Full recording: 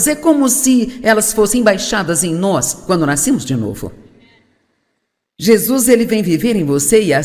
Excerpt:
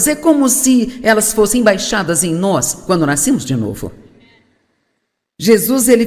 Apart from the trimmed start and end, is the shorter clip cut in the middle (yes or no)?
no